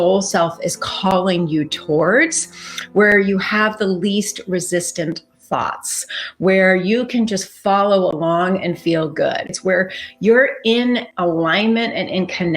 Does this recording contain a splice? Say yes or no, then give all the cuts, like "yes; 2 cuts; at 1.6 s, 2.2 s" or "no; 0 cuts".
yes; 1 cut; at 9.5 s